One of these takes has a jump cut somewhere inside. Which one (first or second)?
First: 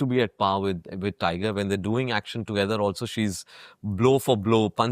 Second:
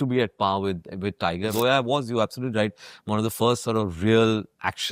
second